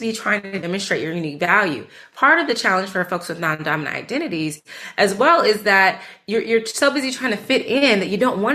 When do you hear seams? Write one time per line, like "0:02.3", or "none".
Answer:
none